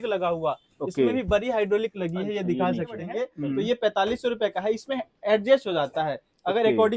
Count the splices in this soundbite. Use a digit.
1